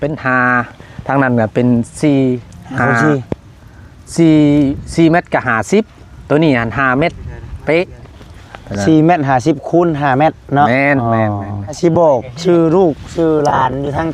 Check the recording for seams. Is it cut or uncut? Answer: cut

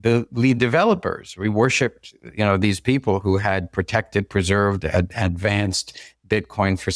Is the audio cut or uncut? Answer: uncut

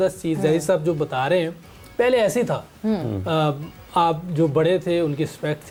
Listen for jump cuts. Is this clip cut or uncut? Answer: uncut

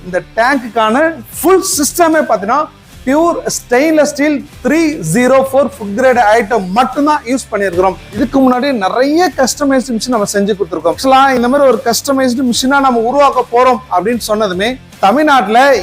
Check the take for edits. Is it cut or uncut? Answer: cut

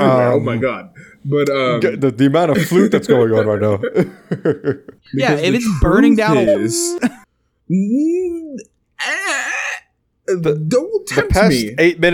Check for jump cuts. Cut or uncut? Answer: cut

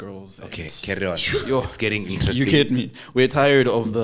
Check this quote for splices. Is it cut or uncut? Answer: uncut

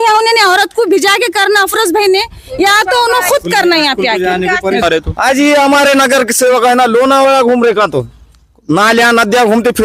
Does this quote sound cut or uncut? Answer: cut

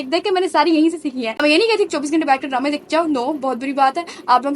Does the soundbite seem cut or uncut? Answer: cut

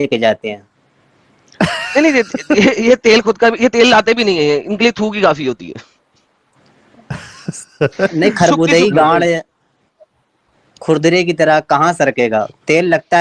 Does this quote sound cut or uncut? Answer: uncut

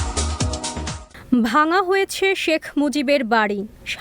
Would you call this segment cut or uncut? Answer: cut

